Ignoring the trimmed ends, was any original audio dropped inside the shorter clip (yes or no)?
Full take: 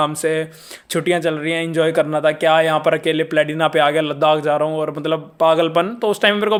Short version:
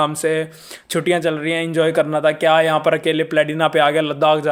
no